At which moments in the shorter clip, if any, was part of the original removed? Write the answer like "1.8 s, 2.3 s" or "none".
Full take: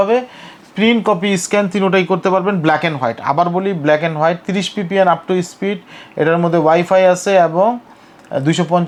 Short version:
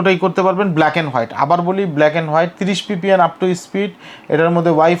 none